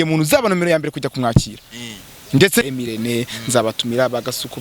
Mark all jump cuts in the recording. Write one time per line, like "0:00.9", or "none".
0:02.6